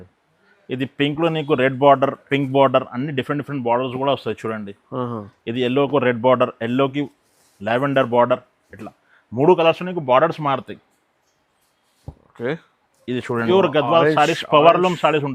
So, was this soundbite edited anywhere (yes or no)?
yes